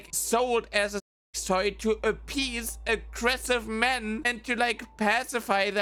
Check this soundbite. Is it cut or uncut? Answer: uncut